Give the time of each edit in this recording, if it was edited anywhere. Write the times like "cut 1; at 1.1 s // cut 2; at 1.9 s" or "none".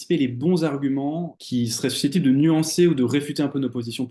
none

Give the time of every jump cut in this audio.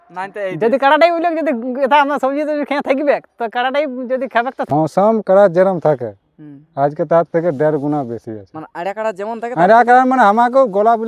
cut 1; at 4.7 s

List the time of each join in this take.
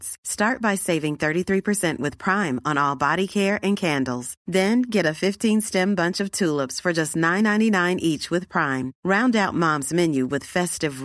none

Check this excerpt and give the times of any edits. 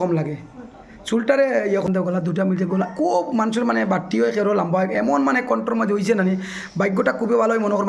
cut 1; at 1.9 s

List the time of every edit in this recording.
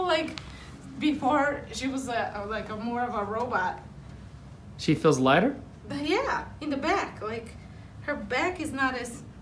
none

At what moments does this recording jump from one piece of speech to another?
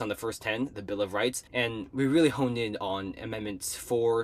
cut 1; at 1.4 s

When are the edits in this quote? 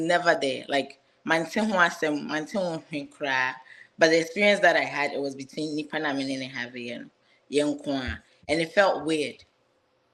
none

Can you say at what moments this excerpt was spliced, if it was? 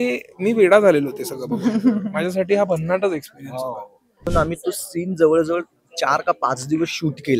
cut 1; at 4.3 s

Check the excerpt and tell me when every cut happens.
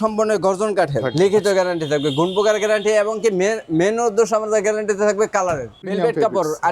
cut 1; at 1.0 s // cut 2; at 5.9 s

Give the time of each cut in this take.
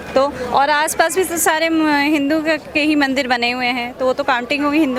none

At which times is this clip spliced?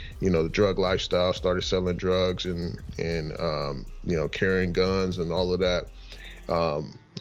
none

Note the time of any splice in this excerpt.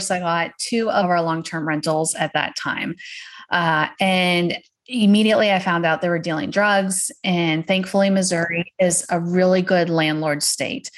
cut 1; at 1.0 s

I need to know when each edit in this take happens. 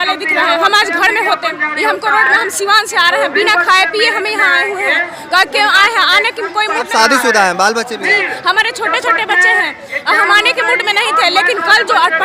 none

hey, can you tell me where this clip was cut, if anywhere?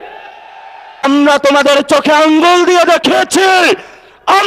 cut 1; at 1.0 s

